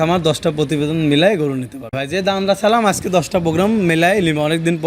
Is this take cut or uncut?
cut